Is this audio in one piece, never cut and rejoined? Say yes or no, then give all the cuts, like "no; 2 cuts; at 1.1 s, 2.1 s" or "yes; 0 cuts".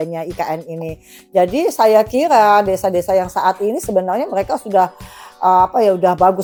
yes; 0 cuts